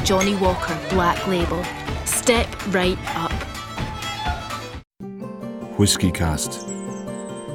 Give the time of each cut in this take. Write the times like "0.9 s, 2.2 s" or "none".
5.0 s